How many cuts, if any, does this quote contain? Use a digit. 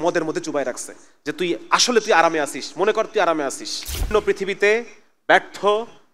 1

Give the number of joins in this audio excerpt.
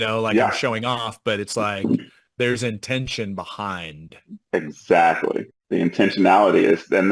0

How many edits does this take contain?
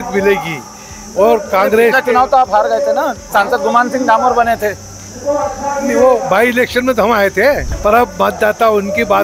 1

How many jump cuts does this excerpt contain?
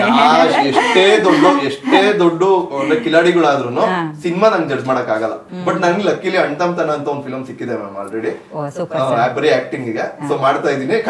1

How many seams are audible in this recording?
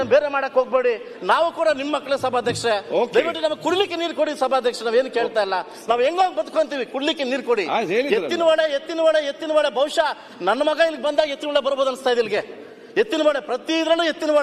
0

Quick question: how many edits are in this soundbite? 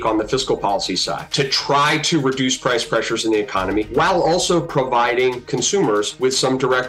3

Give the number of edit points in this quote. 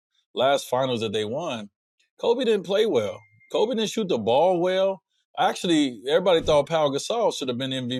0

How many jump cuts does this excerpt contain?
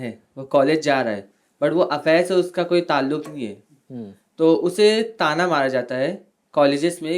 0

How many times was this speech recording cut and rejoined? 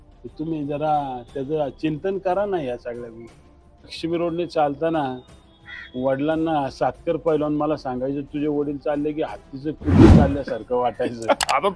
1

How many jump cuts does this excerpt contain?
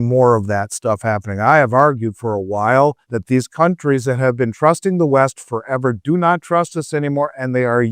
1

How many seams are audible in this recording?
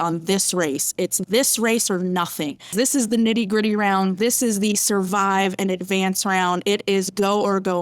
1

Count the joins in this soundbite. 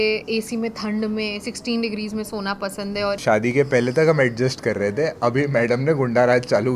1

